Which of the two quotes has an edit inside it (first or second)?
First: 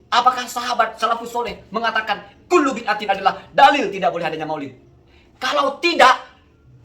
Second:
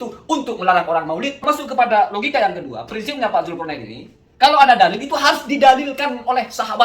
second